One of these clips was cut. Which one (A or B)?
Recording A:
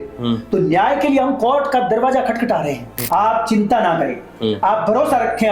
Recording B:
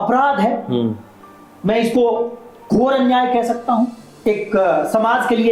A